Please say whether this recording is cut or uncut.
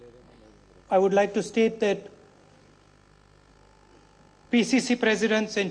uncut